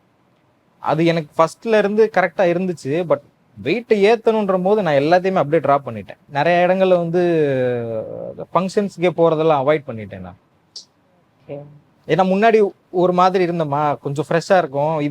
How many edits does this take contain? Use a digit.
1